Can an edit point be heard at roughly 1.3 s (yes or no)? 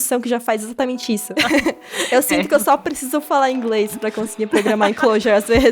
yes